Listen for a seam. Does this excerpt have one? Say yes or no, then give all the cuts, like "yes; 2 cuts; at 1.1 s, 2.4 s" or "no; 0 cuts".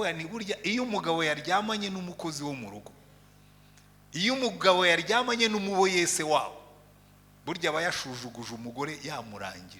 no; 0 cuts